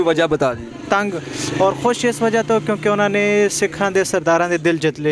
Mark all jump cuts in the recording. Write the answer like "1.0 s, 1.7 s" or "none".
none